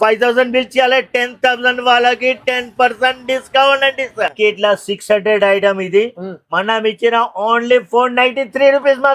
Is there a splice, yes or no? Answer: yes